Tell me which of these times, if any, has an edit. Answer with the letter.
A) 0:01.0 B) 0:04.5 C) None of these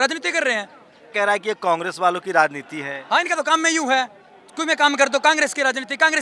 A